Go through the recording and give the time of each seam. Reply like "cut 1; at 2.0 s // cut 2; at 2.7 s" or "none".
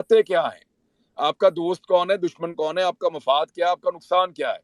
none